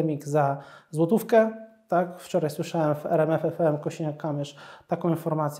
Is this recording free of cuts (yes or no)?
yes